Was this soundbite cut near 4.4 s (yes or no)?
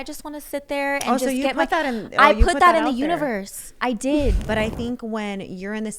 yes